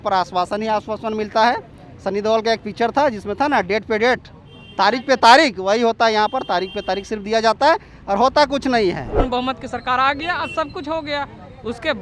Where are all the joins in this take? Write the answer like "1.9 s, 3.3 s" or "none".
9.2 s